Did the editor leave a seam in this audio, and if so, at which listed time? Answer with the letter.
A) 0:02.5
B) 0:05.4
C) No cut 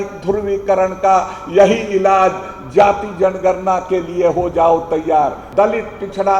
B